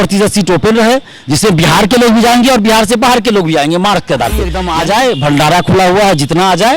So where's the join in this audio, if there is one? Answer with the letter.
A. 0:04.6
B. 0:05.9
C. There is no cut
A